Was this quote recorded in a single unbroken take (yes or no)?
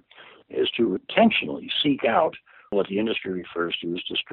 no